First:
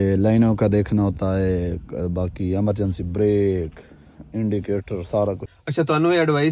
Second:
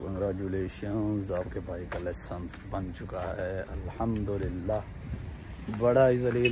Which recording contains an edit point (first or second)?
first